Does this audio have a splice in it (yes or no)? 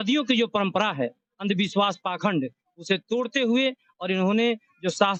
no